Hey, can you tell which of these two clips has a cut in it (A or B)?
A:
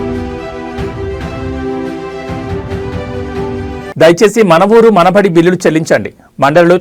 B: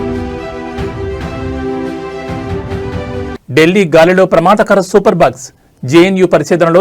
B